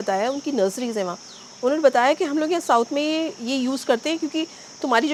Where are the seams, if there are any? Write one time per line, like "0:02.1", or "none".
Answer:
none